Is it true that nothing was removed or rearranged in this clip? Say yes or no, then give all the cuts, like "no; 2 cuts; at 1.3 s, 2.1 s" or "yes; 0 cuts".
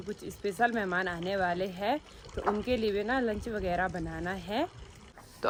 yes; 0 cuts